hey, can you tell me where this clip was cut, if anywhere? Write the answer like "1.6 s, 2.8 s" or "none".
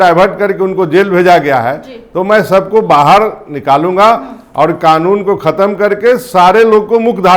none